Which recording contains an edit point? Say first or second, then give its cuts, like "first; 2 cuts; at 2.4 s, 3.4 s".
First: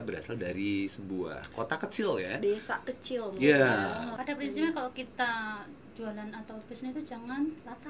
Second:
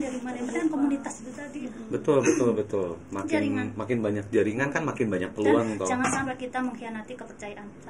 first; 1 cut; at 4.1 s